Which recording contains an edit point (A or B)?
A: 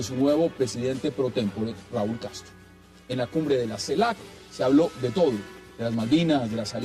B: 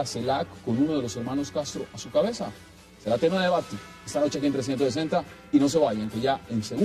A